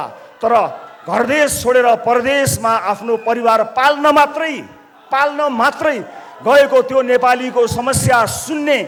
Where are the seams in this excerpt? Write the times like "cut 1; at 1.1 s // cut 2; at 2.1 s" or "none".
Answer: none